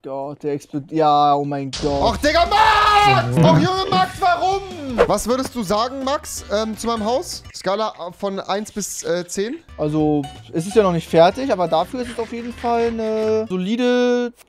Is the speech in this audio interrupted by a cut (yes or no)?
yes